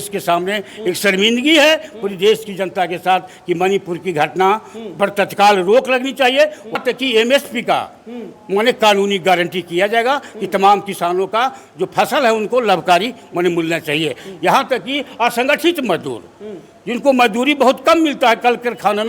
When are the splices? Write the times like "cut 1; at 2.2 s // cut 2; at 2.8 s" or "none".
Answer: cut 1; at 6.8 s